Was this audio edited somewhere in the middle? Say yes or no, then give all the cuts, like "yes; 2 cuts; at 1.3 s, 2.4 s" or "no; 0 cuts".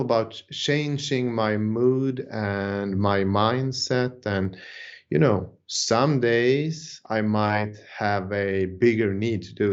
no; 0 cuts